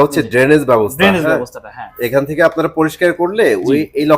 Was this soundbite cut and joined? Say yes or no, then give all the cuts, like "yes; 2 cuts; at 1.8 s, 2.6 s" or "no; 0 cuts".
no; 0 cuts